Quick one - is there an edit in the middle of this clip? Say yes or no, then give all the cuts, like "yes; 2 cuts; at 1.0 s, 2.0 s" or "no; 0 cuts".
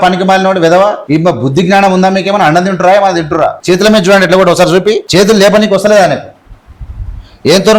yes; 3 cuts; at 1.0 s, 3.6 s, 5.0 s